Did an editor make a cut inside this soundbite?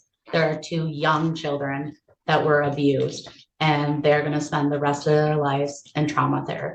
no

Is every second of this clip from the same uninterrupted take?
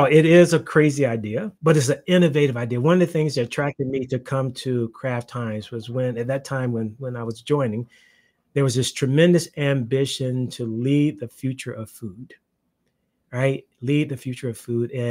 no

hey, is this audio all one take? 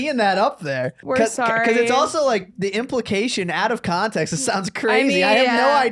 no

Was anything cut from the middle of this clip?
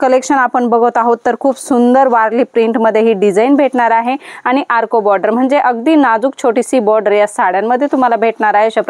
no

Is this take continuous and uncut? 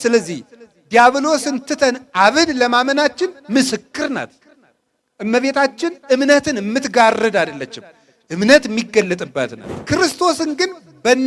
no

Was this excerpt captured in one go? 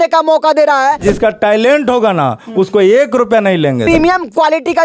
no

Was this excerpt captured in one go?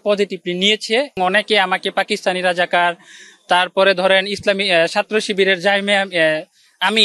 no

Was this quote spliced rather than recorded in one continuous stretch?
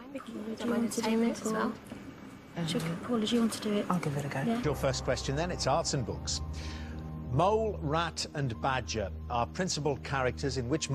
no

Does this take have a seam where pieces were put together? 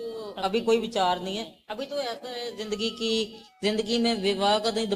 no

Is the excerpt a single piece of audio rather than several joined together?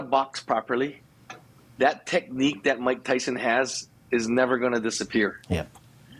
yes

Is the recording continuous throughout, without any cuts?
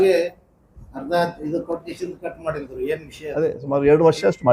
no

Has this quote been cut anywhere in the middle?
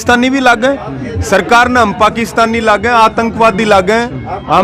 no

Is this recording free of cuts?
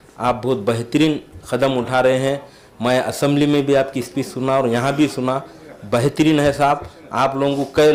yes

